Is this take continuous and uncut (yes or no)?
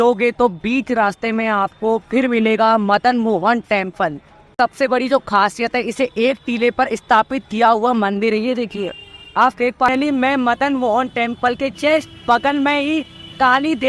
no